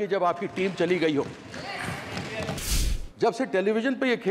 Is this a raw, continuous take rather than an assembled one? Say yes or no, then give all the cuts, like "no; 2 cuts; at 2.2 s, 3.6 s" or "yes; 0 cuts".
no; 1 cut; at 2.7 s